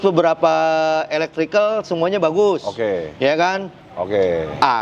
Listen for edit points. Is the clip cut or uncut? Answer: cut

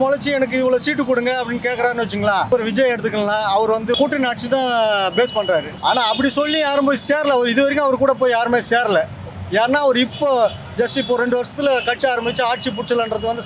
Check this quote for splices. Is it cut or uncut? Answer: cut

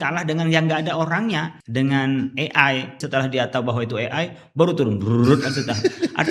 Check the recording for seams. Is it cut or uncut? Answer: cut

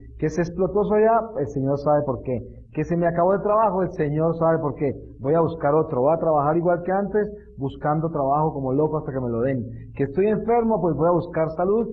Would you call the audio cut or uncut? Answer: uncut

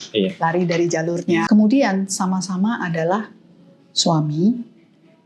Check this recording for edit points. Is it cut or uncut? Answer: cut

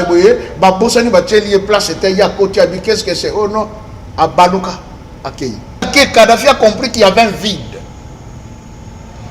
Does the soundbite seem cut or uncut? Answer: cut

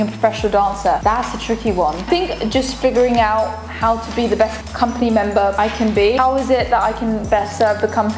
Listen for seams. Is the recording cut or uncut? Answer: uncut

